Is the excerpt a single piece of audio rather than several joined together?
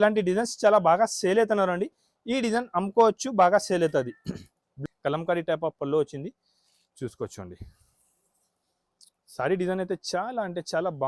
no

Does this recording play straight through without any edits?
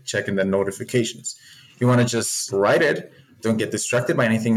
no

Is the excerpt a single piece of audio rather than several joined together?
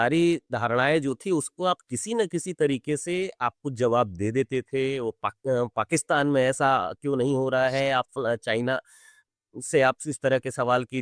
yes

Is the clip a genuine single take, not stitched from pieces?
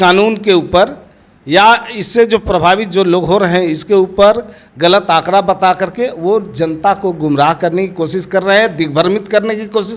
yes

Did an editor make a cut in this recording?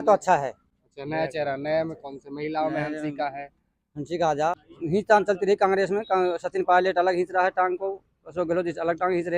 yes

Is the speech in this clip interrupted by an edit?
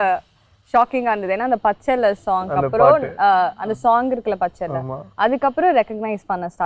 no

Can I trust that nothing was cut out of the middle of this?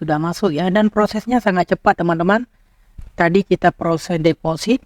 yes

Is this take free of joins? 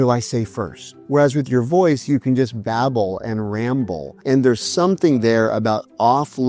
yes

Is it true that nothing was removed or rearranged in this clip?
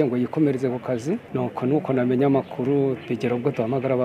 no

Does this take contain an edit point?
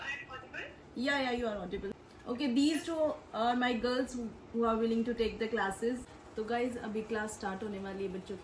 yes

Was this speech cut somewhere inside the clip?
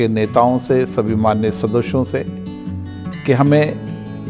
no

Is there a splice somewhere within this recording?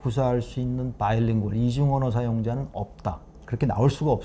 yes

